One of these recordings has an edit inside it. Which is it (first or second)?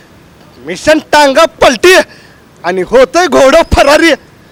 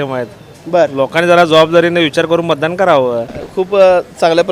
second